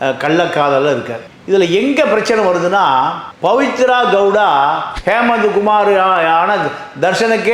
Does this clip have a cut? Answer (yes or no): yes